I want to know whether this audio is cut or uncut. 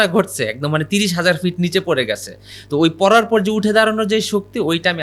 uncut